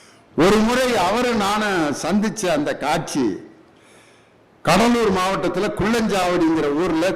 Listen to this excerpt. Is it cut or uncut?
uncut